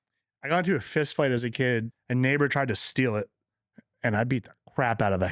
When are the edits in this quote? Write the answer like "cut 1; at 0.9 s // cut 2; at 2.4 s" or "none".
cut 1; at 1.9 s